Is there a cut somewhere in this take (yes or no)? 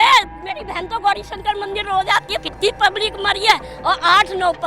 yes